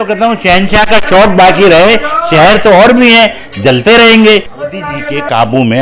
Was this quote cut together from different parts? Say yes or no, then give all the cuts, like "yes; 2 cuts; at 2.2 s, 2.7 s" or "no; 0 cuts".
yes; 1 cut; at 4.7 s